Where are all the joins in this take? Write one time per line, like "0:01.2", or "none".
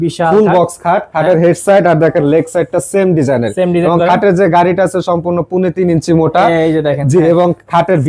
none